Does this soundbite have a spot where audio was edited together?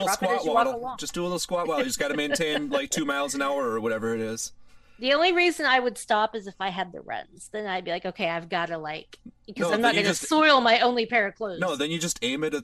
no; 0 cuts

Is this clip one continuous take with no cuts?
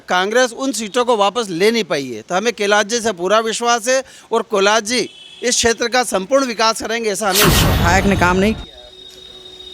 no; 1 cut; at 7.7 s

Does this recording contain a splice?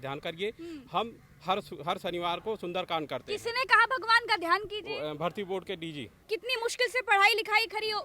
yes; 1 cut; at 6.2 s

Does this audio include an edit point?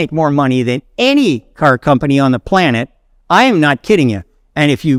no; 0 cuts

